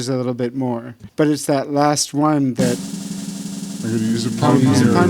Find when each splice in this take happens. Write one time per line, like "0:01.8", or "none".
0:01.0